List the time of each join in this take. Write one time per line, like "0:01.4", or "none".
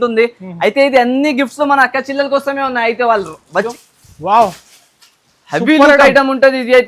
0:03.5